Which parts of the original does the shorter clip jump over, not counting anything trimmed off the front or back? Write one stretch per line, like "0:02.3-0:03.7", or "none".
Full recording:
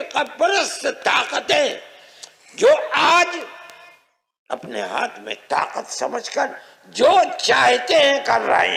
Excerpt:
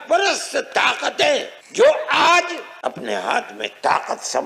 0:01.9-0:02.4
0:03.5-0:04.3